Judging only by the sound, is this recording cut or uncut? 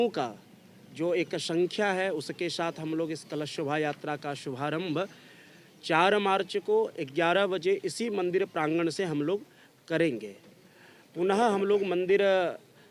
uncut